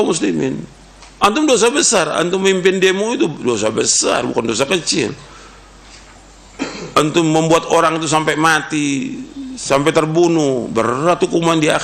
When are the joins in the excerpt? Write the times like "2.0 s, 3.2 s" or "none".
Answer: none